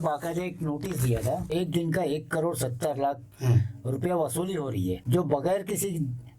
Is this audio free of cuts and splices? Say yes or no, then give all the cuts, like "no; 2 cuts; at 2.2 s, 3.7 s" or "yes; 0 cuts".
no; 2 cuts; at 1.5 s, 5.0 s